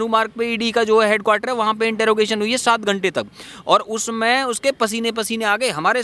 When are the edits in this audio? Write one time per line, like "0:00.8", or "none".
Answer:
none